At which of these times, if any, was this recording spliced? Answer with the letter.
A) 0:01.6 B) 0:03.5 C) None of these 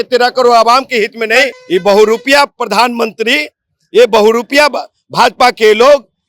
A